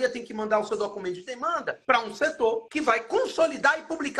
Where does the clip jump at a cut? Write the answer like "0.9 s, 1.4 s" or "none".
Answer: 1.7 s, 2.7 s